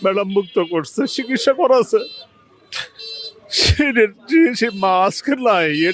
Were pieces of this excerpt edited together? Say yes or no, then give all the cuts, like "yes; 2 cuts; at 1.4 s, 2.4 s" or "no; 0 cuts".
no; 0 cuts